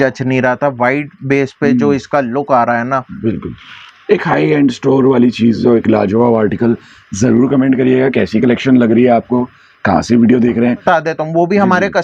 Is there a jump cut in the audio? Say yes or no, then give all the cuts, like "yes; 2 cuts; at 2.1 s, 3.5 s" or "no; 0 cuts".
yes; 1 cut; at 10.8 s